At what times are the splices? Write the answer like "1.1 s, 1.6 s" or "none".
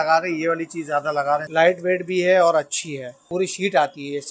1.5 s, 3.2 s